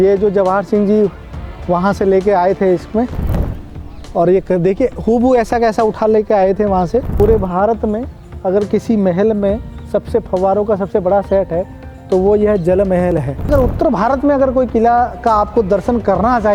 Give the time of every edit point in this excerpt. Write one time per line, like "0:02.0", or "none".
0:03.5
0:07.1
0:13.5